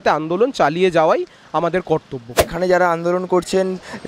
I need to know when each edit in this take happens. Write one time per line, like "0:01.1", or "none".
0:02.4